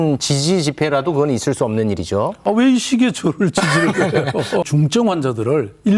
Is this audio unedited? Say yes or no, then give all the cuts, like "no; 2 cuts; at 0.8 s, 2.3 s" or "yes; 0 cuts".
no; 2 cuts; at 2.4 s, 4.6 s